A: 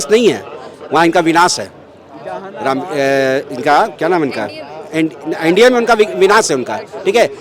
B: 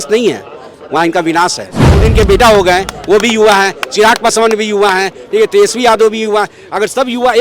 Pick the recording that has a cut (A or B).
B